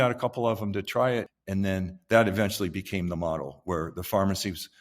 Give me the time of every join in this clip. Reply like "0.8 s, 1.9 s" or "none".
1.3 s